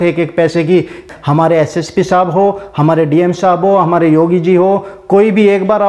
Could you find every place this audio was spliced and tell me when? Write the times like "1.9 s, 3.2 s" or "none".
1.0 s